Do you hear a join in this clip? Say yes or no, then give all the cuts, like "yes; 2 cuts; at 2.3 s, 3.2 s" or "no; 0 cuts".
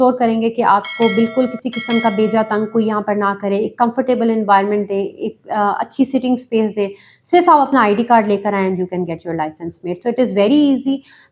no; 0 cuts